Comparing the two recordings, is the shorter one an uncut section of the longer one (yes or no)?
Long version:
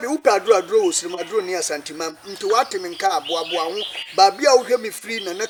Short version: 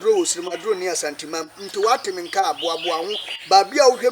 yes